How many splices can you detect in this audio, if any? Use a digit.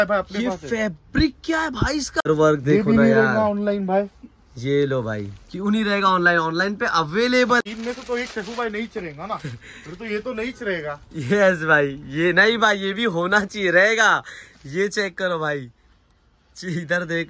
2